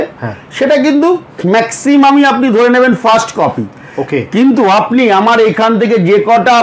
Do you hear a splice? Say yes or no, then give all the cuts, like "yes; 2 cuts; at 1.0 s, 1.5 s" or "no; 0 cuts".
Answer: no; 0 cuts